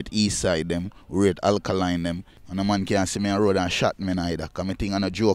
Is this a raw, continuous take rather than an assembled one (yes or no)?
no